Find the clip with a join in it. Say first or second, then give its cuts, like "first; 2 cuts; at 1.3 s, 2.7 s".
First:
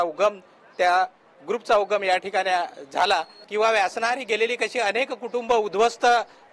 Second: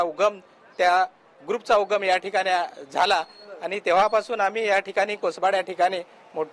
first; 1 cut; at 3.4 s